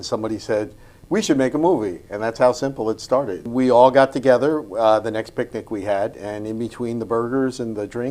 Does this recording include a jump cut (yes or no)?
yes